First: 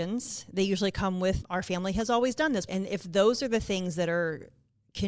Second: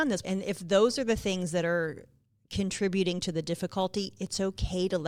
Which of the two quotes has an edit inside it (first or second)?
first